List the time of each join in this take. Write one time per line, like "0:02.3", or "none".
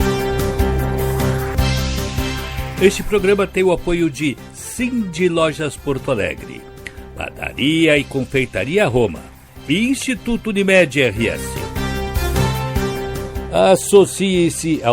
0:00.8
0:02.7
0:11.4
0:13.3